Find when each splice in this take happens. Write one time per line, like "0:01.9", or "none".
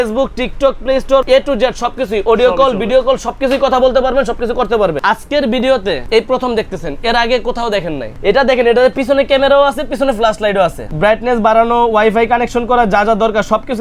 0:01.2
0:05.0
0:06.0
0:08.0
0:10.8